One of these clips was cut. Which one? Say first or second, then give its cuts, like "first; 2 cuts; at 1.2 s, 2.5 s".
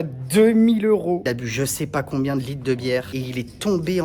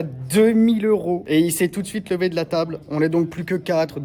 first; 2 cuts; at 1.2 s, 3.1 s